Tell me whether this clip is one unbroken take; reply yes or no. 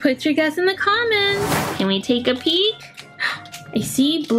no